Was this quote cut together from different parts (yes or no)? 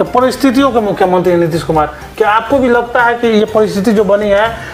no